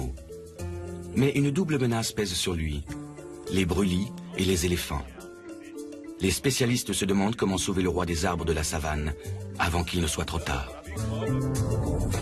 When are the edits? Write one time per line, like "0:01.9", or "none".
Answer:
none